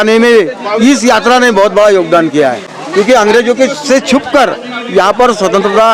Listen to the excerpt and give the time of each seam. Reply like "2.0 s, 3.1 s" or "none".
none